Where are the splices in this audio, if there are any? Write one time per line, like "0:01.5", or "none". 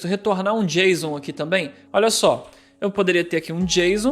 0:01.8